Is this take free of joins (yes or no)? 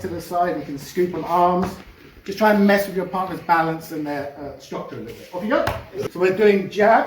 no